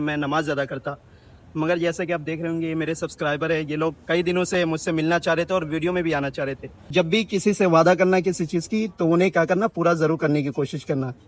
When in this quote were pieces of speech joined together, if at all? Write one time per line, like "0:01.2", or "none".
0:06.9